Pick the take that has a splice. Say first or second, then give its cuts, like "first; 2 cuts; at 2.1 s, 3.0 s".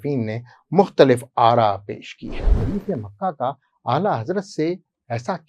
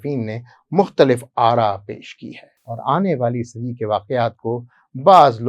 first; 1 cut; at 2.6 s